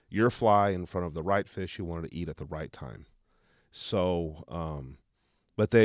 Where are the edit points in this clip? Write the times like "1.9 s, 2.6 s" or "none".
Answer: none